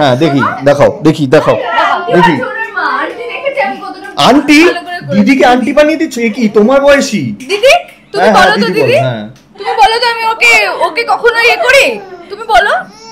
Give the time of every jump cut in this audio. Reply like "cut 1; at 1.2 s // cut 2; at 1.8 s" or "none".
none